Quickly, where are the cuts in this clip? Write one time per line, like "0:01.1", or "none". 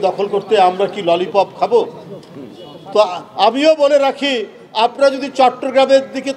none